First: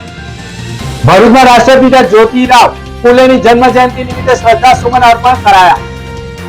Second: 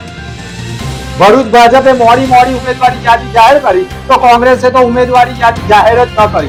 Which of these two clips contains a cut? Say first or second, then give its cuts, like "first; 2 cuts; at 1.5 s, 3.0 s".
first; 1 cut; at 1.0 s